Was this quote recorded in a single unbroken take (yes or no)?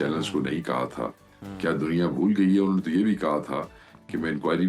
yes